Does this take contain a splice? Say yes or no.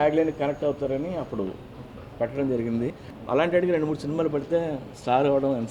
yes